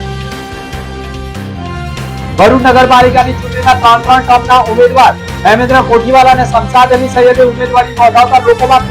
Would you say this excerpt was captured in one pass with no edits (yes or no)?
yes